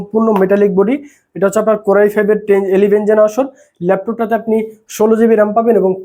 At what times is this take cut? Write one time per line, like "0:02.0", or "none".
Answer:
none